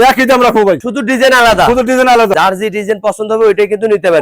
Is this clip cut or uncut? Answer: cut